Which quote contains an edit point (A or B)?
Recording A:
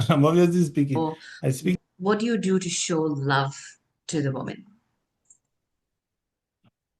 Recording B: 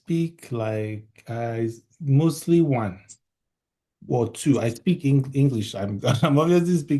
A